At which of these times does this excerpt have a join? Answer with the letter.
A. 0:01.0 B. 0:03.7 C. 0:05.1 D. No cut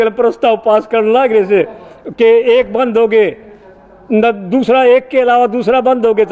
D